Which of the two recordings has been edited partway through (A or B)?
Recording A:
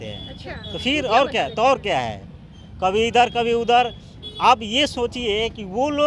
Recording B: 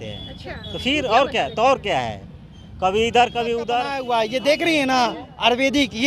B